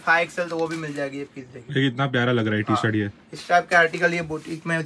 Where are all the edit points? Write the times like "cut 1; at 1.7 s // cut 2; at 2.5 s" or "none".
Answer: none